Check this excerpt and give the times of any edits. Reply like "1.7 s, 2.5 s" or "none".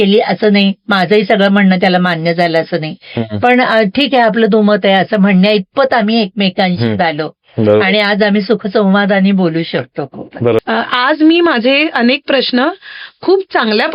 10.6 s